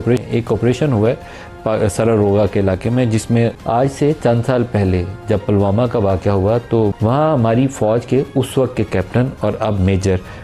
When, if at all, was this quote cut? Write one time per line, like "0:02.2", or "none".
0:03.6
0:07.0